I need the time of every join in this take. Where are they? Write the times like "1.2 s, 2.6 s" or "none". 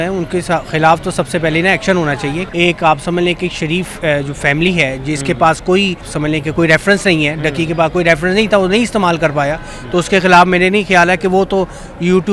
2.4 s, 6.1 s